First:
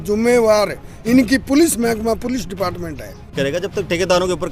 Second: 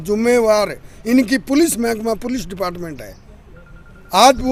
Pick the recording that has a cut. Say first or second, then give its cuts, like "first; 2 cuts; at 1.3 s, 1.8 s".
first; 1 cut; at 3.3 s